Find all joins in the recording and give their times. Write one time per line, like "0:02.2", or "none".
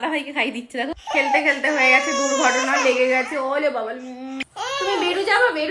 0:01.0
0:04.4